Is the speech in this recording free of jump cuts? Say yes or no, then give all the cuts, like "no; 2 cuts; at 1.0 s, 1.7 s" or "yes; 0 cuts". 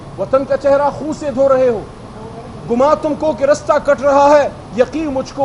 yes; 0 cuts